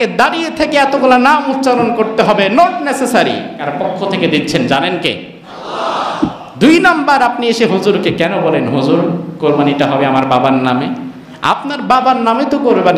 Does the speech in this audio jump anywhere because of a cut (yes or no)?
yes